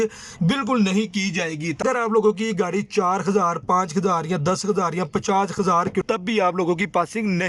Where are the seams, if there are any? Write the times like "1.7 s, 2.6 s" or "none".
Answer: 1.8 s, 6.0 s

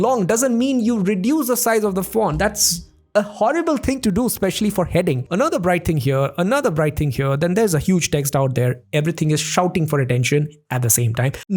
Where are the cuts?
5.2 s

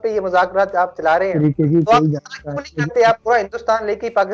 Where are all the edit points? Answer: 1.3 s

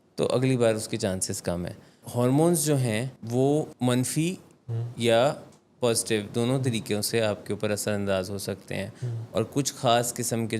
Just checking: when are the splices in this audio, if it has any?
2.0 s, 3.2 s, 3.7 s

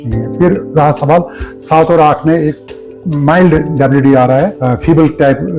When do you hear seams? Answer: 4.6 s

